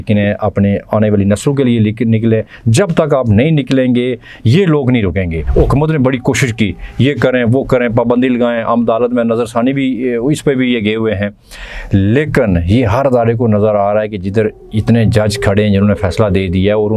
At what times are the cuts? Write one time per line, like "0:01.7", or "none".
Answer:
0:05.4